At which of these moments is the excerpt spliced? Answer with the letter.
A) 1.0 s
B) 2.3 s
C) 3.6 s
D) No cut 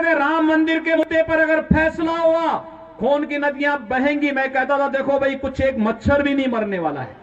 A